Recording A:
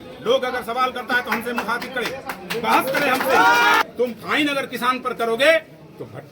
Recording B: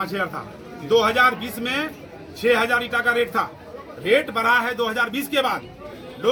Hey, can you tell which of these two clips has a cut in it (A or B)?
A